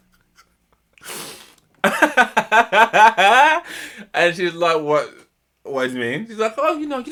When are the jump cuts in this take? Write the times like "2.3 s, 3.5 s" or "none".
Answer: none